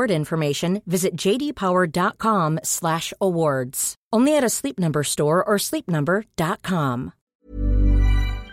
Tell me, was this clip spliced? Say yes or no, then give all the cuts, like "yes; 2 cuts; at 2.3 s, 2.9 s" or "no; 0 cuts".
yes; 1 cut; at 7.2 s